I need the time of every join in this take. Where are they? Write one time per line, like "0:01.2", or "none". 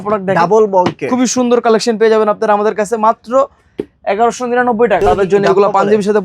0:05.0